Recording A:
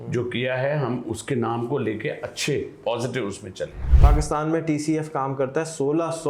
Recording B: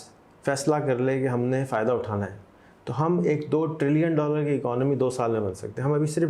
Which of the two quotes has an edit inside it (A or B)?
A